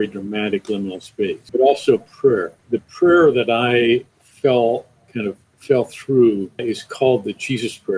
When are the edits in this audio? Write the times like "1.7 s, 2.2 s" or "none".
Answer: 1.4 s, 2.5 s, 4.2 s, 6.6 s